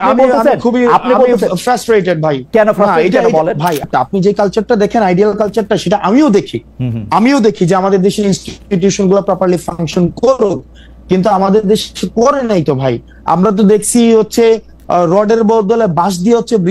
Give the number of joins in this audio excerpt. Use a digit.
1